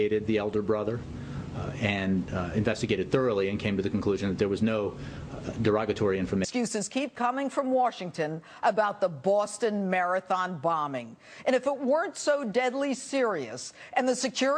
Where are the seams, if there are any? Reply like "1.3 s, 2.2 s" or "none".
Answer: none